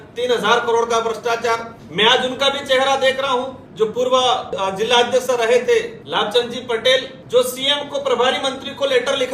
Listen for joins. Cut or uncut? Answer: cut